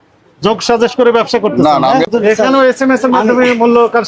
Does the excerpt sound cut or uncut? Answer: cut